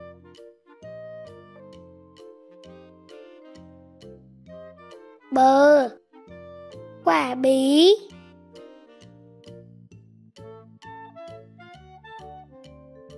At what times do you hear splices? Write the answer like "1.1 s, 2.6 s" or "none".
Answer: 5.3 s, 8.5 s